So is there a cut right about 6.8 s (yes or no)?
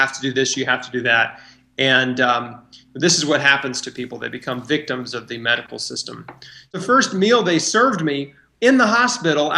yes